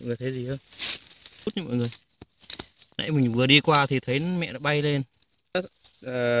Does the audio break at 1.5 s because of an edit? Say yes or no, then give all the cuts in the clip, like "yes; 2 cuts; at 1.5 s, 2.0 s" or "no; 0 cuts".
yes; 2 cuts; at 1.5 s, 5.5 s